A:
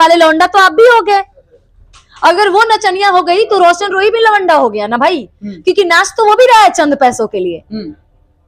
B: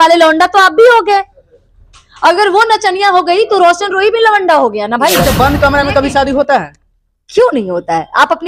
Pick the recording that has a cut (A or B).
B